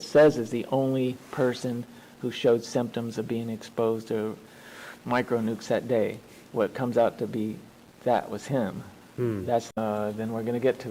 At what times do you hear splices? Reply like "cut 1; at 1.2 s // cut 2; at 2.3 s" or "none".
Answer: cut 1; at 9.7 s

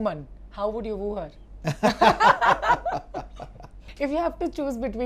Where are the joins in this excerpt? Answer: cut 1; at 1.4 s // cut 2; at 3.9 s

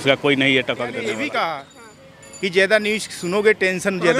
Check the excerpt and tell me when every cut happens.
cut 1; at 1.0 s

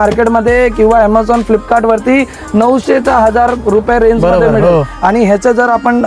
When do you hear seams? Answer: none

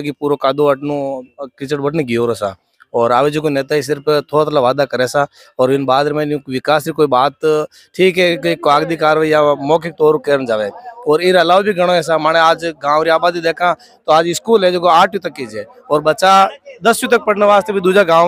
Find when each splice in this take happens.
none

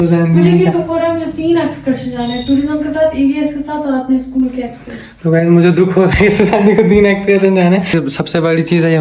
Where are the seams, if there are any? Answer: cut 1; at 8.0 s

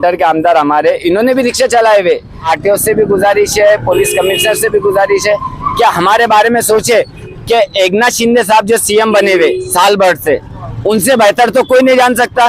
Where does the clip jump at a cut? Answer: cut 1; at 2.4 s // cut 2; at 7.2 s

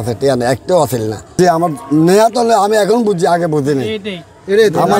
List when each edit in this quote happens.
cut 1; at 1.2 s

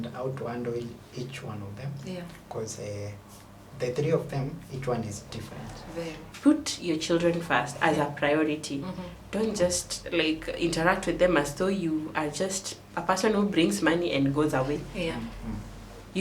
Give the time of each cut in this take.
cut 1; at 6.3 s

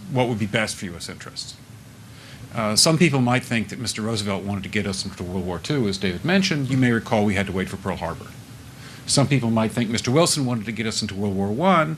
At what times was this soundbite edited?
cut 1; at 1.9 s // cut 2; at 5.9 s

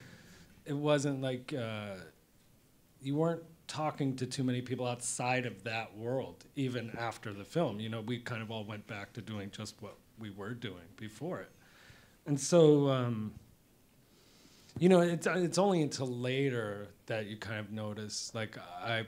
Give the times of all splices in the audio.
none

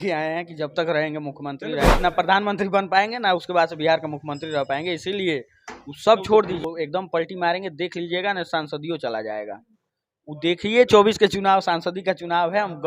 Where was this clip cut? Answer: cut 1; at 2.0 s // cut 2; at 6.6 s

